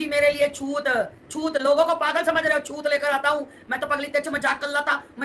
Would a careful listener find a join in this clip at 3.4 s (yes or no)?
no